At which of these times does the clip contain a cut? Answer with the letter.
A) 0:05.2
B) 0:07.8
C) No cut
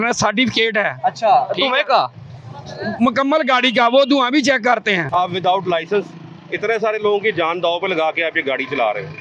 A